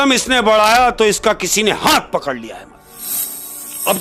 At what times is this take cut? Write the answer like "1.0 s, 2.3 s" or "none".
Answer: none